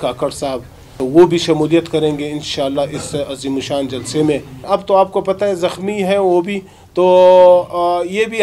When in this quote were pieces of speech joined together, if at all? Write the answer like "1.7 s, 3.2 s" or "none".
0.9 s, 4.7 s